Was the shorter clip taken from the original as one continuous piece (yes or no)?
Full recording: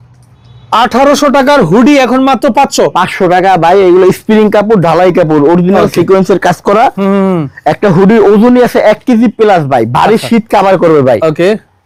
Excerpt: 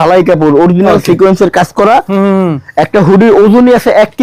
yes